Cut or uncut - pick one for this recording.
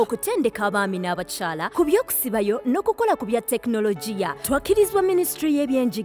uncut